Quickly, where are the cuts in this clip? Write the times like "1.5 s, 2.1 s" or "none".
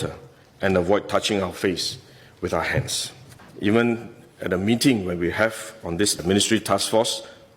3.4 s

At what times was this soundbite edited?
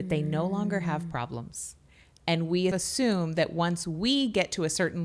2.7 s

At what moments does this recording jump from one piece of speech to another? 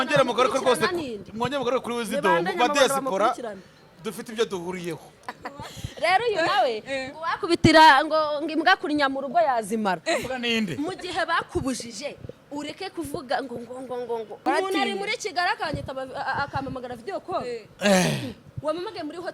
5.3 s, 14.4 s

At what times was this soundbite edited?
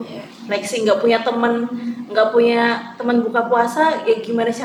none

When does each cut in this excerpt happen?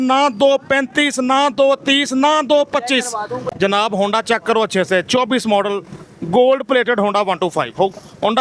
3.3 s

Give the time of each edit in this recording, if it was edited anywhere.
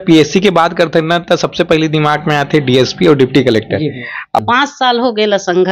4.4 s

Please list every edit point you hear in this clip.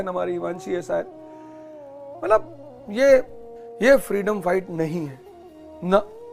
none

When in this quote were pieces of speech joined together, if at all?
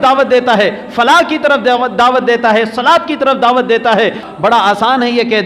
4.2 s

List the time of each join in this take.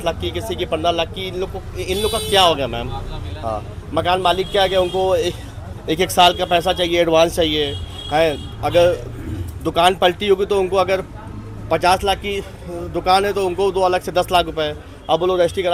none

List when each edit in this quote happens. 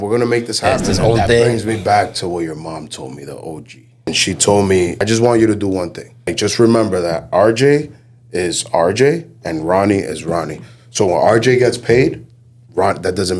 0.9 s, 4.1 s, 5.0 s, 6.3 s

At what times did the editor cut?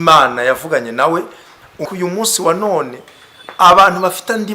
1.9 s

